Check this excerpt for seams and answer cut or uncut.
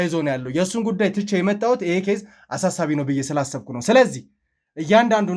uncut